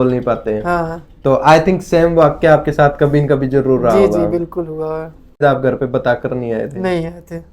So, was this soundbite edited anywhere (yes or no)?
yes